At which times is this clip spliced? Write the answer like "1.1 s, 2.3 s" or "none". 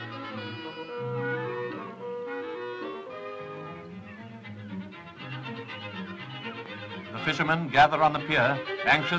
none